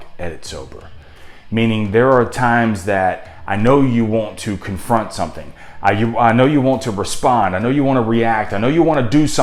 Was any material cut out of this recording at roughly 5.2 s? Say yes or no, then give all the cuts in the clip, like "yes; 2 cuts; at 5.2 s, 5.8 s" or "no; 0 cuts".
no; 0 cuts